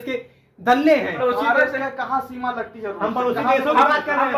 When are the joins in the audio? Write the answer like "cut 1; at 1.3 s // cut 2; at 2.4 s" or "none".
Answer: cut 1; at 1.2 s

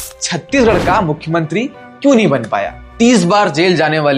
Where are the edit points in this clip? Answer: cut 1; at 2.8 s

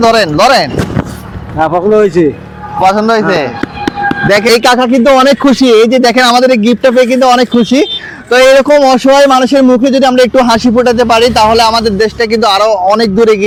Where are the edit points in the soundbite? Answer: none

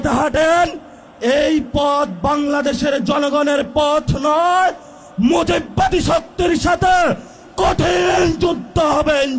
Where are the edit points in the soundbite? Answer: none

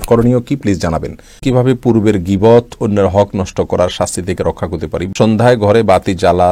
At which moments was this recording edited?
cut 1; at 1.4 s // cut 2; at 5.1 s

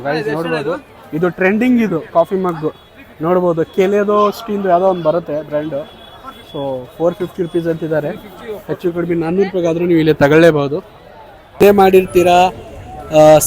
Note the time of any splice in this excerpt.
cut 1; at 11.5 s

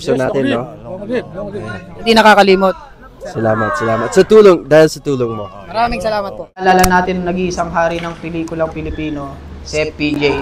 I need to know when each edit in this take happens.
cut 1; at 6.6 s

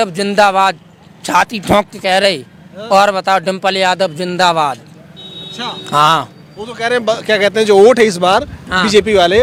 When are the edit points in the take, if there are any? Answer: none

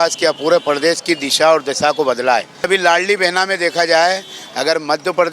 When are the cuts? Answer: cut 1; at 2.6 s

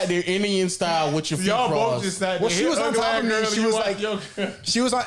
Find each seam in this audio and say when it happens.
none

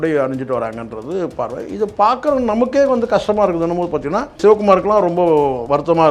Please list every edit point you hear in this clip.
cut 1; at 4.4 s

